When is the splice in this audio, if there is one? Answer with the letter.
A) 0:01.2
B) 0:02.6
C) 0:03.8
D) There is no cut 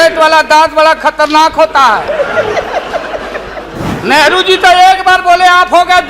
C